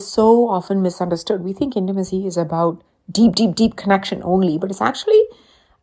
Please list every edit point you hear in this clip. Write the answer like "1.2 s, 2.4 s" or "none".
none